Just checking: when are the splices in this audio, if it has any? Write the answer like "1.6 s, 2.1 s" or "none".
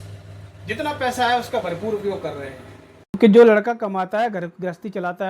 3.1 s

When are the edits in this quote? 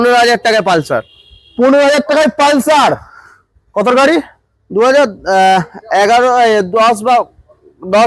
none

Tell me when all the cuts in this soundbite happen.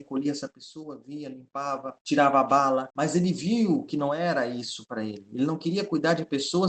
1.9 s, 2.9 s

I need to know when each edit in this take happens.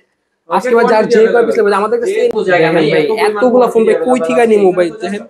2.3 s

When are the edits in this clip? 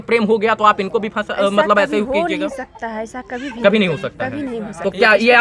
none

